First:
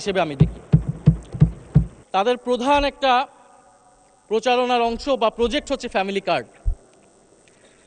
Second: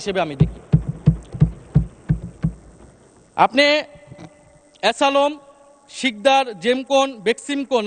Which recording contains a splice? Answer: first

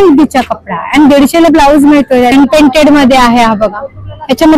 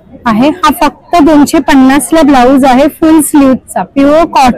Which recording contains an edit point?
first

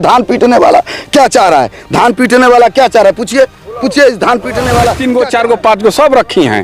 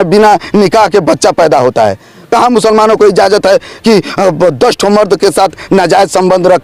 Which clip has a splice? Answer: first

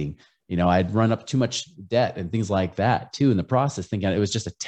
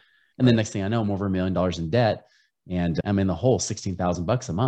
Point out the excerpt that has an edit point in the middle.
second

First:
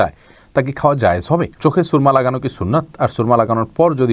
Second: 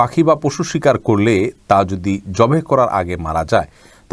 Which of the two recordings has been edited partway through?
first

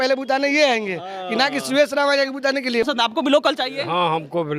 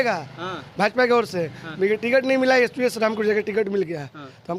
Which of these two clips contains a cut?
first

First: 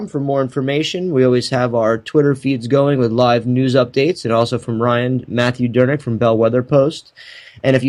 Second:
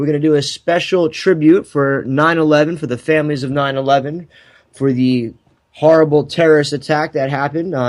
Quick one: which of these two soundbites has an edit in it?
first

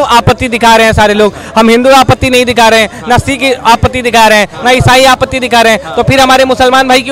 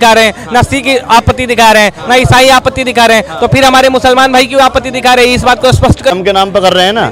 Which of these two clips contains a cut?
second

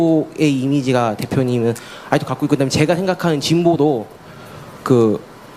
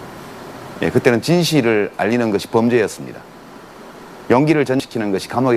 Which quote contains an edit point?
first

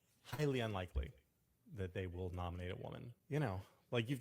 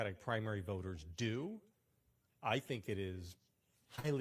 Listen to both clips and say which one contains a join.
first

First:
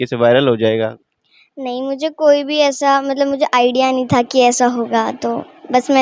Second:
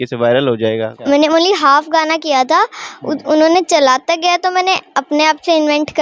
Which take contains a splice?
second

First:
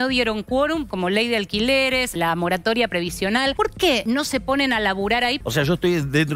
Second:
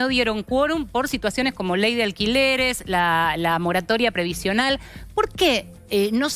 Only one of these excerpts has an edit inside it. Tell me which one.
first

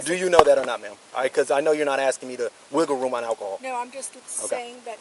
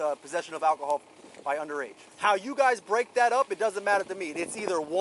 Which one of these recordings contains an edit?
second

